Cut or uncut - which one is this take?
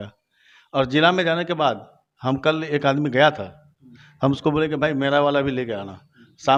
uncut